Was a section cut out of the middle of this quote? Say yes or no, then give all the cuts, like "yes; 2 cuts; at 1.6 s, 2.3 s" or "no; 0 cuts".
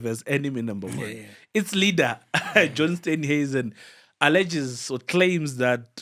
no; 0 cuts